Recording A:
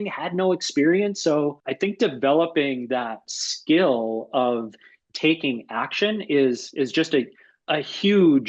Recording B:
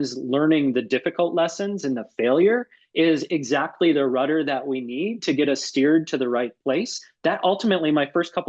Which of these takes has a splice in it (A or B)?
A